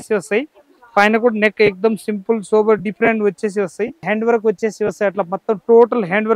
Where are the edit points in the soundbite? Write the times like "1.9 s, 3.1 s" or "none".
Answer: 4.0 s